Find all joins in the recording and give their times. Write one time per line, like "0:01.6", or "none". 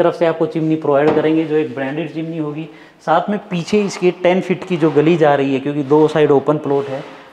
none